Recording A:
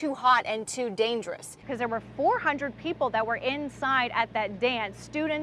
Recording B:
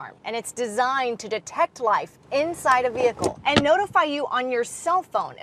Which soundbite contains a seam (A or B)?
A